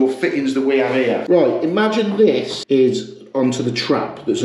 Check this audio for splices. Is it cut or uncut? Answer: cut